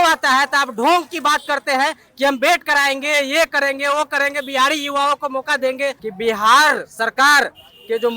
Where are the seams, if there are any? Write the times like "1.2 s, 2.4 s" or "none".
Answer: 6.1 s

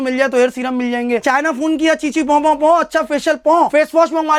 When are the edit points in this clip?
none

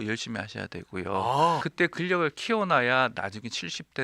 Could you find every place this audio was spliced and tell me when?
1.7 s

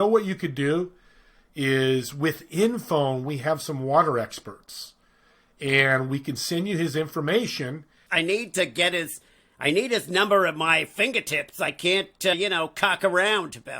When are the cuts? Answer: 8.0 s, 12.3 s

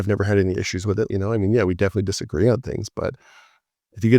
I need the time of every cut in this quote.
1.1 s

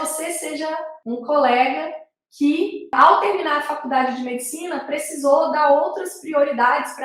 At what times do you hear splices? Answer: 0.9 s, 2.9 s

